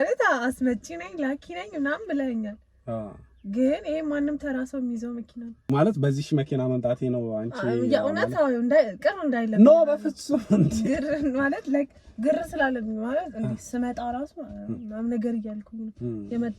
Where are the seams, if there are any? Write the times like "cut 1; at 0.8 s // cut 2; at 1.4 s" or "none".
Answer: cut 1; at 5.6 s